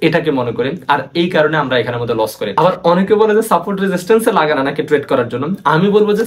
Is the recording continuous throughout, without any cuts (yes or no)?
no